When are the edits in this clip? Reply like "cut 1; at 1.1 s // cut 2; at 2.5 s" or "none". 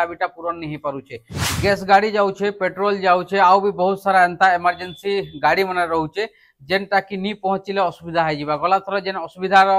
cut 1; at 1.3 s